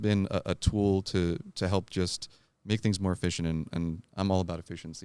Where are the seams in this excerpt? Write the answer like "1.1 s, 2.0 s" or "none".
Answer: none